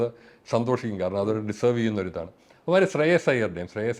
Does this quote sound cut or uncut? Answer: uncut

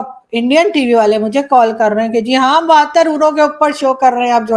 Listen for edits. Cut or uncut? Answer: uncut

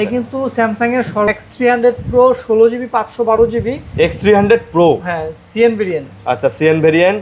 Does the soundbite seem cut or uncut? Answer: cut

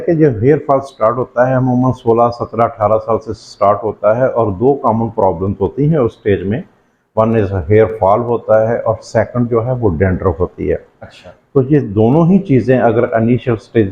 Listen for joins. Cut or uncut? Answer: uncut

